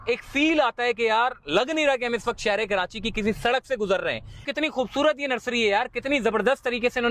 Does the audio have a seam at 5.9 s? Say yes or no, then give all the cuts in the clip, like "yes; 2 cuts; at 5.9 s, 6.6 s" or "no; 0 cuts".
no; 1 cut; at 4.5 s